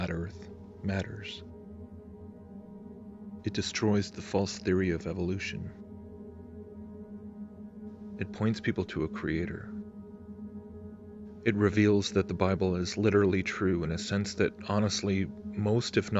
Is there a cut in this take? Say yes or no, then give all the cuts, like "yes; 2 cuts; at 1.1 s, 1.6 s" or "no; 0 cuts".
yes; 1 cut; at 4.5 s